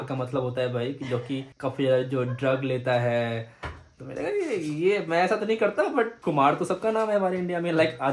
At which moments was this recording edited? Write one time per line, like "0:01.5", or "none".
none